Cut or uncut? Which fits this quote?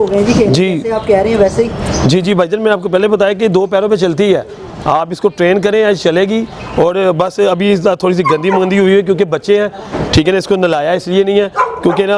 uncut